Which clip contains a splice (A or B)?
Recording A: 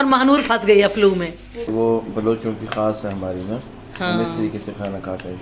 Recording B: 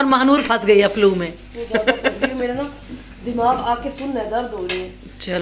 A